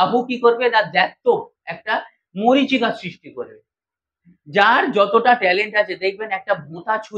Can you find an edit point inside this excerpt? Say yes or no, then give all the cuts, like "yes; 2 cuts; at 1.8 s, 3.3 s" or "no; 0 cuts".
no; 0 cuts